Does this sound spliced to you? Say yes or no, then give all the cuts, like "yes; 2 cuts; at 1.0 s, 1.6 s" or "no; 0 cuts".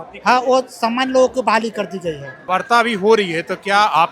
yes; 1 cut; at 2.3 s